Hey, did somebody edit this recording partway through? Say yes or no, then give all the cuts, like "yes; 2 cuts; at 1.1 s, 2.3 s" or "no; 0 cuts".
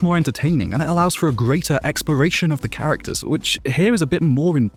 no; 0 cuts